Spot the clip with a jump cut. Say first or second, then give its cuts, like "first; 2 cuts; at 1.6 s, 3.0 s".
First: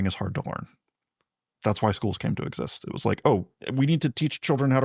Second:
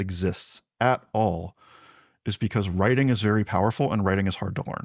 first; 1 cut; at 3.6 s